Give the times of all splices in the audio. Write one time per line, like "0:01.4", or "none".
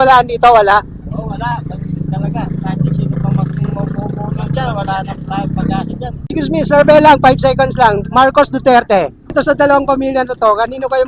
0:06.3
0:09.3